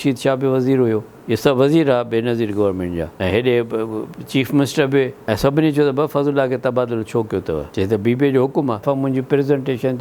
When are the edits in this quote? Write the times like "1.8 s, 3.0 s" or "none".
8.8 s